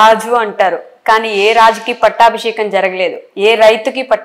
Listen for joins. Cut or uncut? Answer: uncut